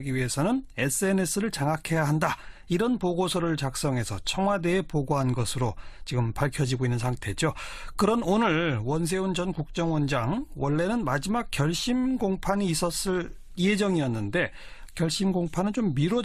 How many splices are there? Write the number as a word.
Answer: zero